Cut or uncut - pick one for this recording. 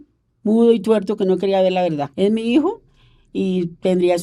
cut